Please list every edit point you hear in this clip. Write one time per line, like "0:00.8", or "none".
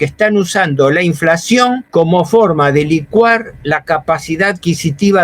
0:01.8